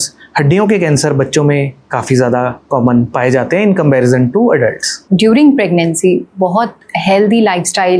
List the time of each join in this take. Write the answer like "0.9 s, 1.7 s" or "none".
4.9 s